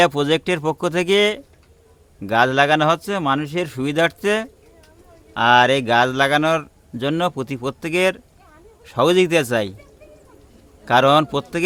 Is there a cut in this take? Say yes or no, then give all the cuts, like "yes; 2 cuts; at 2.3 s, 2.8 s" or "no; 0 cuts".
no; 0 cuts